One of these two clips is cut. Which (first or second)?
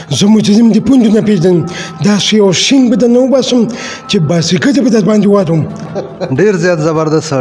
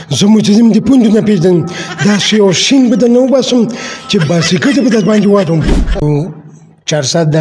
second